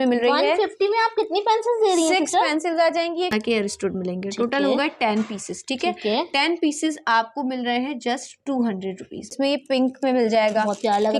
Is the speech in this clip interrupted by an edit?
yes; 2 cuts; at 3.3 s, 9.3 s

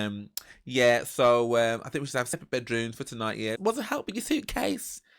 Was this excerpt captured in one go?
no; 1 cut; at 2.3 s

